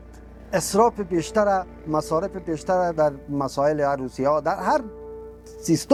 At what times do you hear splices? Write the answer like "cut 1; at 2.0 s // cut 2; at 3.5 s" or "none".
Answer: none